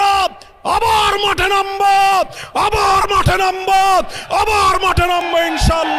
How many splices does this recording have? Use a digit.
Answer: 0